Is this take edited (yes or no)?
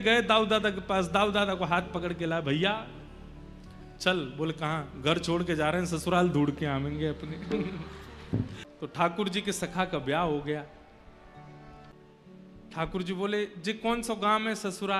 yes